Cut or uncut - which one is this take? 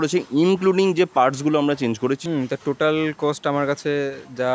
cut